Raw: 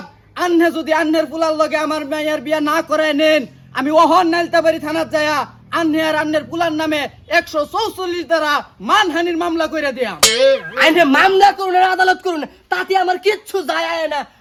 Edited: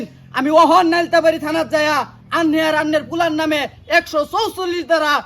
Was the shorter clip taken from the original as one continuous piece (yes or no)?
yes